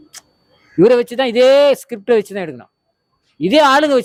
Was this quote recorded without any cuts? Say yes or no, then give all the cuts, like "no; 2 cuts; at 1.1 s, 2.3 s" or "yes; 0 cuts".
yes; 0 cuts